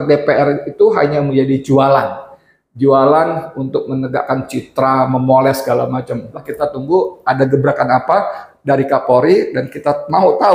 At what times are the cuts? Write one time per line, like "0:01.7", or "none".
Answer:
0:06.5